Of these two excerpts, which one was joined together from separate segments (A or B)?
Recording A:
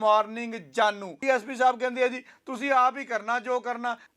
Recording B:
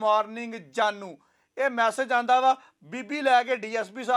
A